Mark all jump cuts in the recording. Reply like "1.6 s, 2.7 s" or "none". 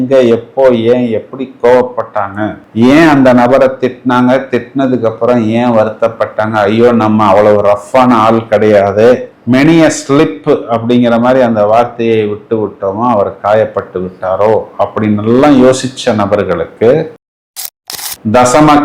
17.7 s